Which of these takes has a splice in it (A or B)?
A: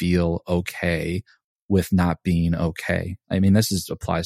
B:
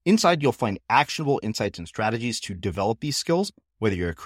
A